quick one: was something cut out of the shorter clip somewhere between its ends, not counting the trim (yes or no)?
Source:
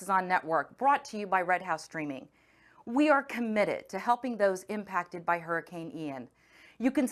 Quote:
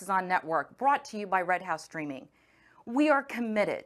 no